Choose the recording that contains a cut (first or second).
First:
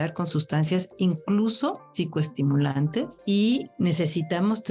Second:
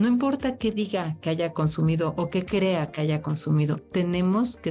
first